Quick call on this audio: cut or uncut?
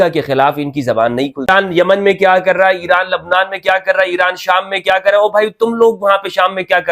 cut